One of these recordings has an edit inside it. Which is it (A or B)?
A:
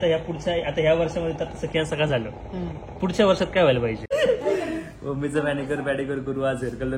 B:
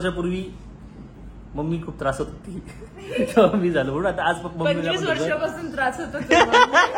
A